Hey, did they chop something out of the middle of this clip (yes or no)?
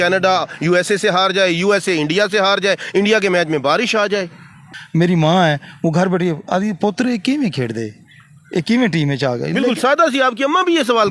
yes